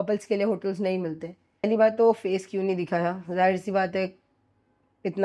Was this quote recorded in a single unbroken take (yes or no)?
no